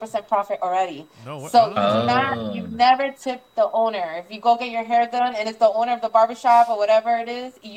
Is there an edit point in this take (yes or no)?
no